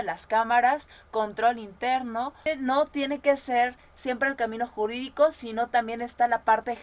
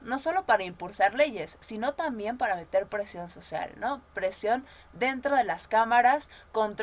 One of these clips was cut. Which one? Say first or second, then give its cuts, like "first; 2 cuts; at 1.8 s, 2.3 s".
first; 1 cut; at 2.4 s